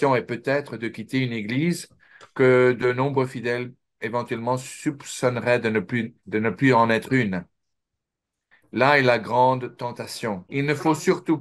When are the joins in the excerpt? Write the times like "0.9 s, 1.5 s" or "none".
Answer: 10.5 s